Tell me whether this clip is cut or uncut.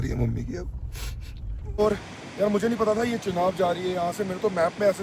cut